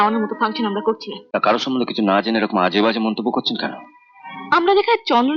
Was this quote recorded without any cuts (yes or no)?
no